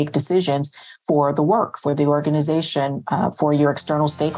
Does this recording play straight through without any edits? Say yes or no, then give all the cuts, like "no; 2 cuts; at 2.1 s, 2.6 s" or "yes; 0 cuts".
yes; 0 cuts